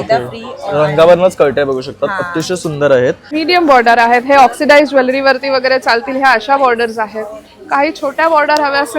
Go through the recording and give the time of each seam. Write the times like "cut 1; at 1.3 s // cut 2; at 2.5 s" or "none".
cut 1; at 3.3 s